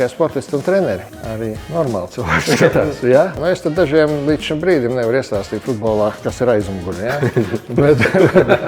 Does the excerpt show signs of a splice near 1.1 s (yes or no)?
yes